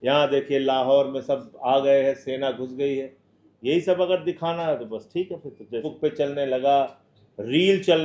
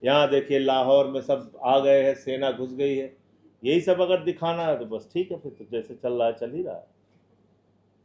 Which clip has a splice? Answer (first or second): first